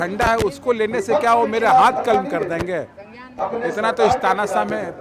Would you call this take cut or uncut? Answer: uncut